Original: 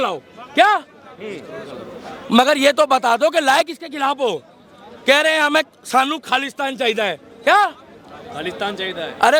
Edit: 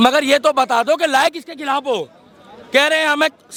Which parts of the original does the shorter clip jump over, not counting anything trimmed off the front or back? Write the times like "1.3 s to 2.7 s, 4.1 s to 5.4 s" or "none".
none

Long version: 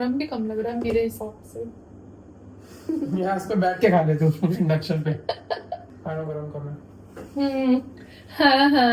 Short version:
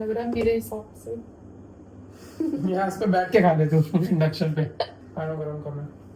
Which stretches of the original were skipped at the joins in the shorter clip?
5.4 s to 5.8 s

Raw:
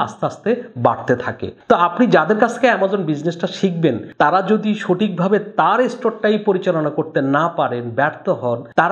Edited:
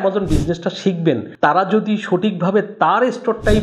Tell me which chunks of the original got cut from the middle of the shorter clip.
none

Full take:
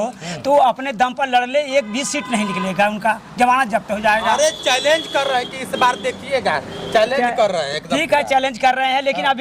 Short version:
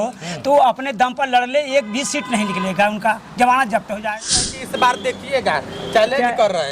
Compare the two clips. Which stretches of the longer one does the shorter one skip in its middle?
4.1 s to 5.1 s

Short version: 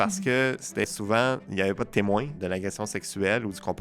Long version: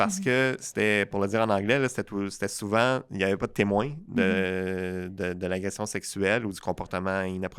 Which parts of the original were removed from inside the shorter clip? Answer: 0.9 s to 2.5 s, 4.0 s to 5.4 s

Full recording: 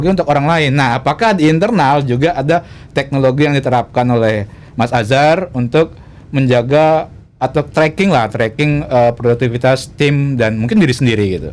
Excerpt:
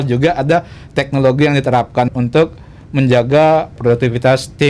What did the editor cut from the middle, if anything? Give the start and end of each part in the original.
4.1 s to 5.5 s, 7.2 s to 9.2 s

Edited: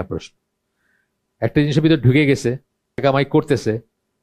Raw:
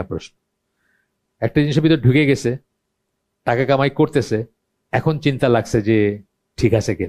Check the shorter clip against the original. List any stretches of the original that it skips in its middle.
3.0 s to 3.7 s

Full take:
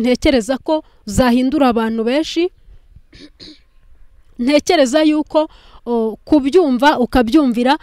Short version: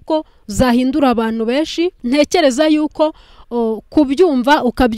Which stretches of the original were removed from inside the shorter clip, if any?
2.6 s to 4.3 s

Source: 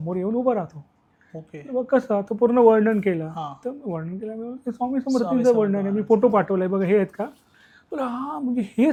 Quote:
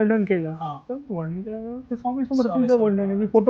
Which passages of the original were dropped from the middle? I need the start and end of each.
none

